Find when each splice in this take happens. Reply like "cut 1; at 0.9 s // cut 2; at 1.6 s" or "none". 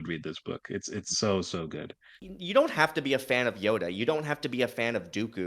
cut 1; at 2.2 s